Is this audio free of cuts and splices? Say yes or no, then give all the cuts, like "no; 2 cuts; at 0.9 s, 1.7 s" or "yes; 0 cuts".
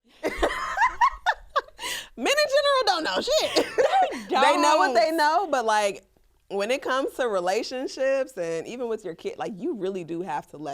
yes; 0 cuts